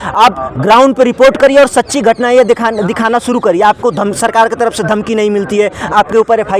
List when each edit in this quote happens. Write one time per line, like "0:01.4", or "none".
none